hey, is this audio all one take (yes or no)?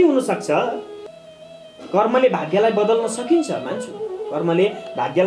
no